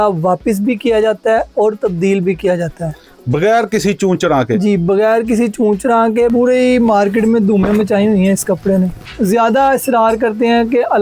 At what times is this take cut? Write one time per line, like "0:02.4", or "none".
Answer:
0:06.3
0:09.0